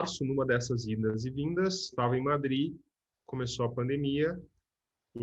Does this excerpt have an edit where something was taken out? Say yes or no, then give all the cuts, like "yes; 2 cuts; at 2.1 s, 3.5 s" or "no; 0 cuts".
yes; 1 cut; at 1.9 s